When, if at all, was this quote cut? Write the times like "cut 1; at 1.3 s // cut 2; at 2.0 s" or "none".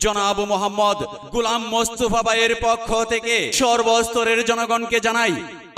none